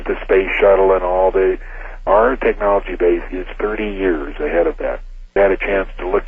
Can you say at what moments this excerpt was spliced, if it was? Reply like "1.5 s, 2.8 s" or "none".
2.0 s, 5.3 s